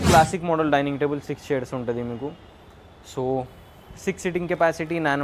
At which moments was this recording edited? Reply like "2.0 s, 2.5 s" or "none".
none